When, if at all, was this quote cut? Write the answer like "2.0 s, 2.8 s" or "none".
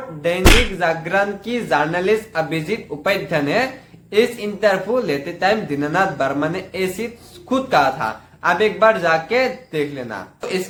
none

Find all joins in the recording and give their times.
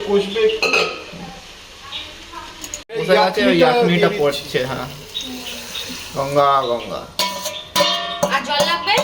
2.8 s

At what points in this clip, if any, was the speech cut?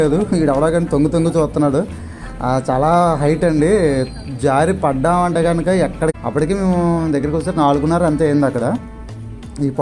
6.1 s

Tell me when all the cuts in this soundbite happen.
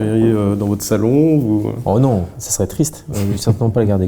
none

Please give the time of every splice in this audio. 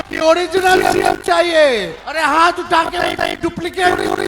2.0 s

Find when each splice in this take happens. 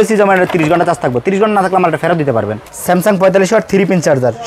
2.6 s

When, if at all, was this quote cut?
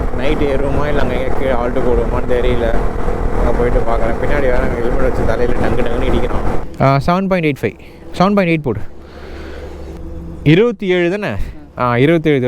6.6 s, 10.0 s

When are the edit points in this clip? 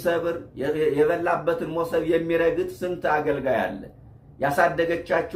none

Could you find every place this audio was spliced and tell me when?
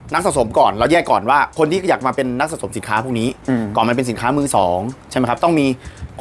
none

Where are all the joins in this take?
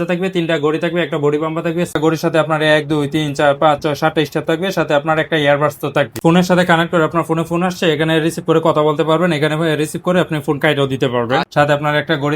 2.0 s, 6.1 s, 11.5 s

